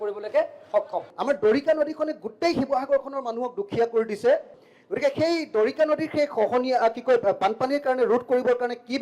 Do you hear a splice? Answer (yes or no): yes